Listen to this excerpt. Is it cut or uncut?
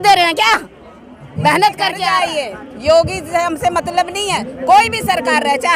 cut